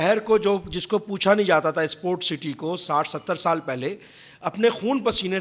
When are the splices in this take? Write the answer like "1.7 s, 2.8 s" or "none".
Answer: none